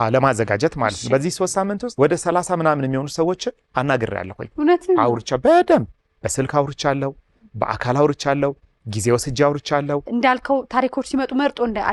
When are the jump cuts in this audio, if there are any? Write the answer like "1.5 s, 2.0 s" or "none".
10.1 s

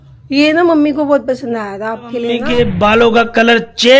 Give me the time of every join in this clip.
2.4 s

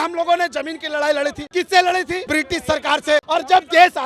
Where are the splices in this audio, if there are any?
1.4 s, 2.2 s, 3.2 s

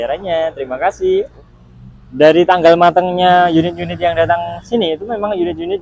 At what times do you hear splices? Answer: 1.3 s

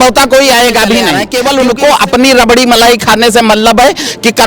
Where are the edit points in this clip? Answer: 1.2 s

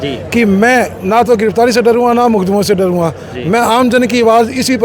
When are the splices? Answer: none

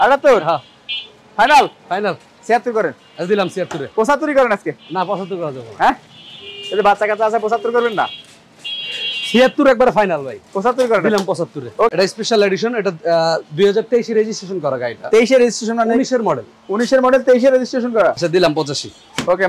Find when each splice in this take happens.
11.9 s, 18.2 s

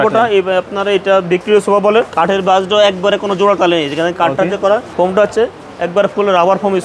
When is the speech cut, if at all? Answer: 2.1 s, 4.9 s

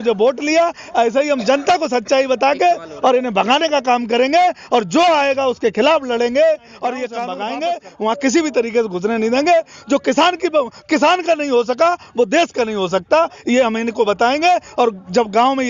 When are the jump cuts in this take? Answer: 7.3 s

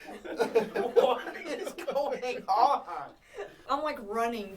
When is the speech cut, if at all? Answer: 3.5 s

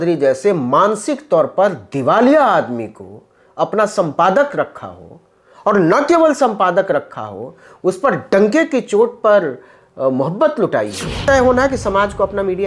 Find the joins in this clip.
11.2 s

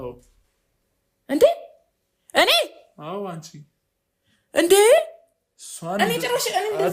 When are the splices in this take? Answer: none

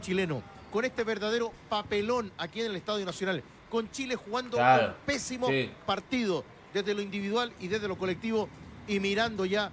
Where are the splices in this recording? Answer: none

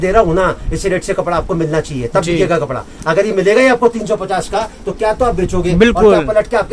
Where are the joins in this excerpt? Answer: none

